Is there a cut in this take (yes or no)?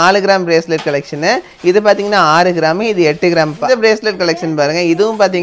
yes